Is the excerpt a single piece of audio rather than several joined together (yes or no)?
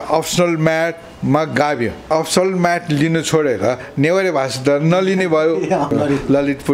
no